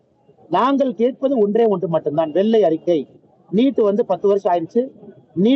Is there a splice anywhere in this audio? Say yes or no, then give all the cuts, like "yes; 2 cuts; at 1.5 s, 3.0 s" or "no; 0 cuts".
no; 0 cuts